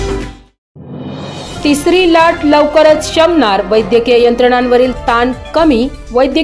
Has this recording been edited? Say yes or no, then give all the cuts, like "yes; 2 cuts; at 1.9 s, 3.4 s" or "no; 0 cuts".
yes; 1 cut; at 1.4 s